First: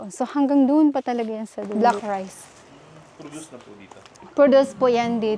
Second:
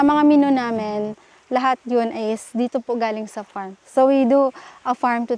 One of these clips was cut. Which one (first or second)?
first